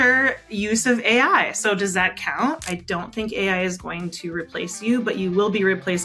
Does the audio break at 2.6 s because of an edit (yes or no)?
yes